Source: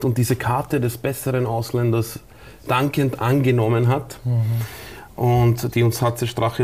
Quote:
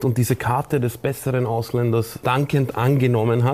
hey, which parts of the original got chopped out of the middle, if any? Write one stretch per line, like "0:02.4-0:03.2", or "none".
0:02.1-0:02.6